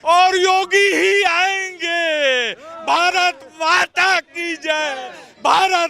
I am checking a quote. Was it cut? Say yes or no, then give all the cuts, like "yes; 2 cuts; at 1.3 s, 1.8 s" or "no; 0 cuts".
no; 0 cuts